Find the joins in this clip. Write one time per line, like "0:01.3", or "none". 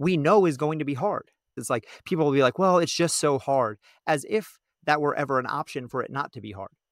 0:01.5